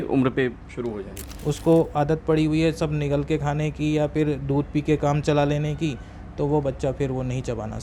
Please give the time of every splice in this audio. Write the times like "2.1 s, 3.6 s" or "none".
1.1 s